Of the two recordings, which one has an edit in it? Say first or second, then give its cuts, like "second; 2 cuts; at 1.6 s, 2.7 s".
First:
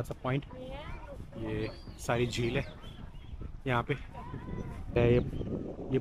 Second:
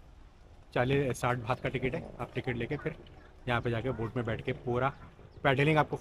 first; 1 cut; at 5.0 s